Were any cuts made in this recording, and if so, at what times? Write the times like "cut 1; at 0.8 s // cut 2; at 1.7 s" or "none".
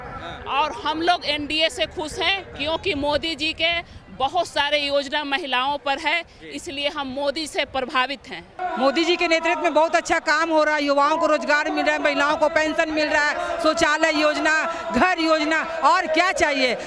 cut 1; at 8.5 s